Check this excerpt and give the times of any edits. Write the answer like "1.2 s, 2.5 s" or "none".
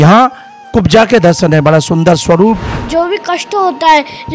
2.7 s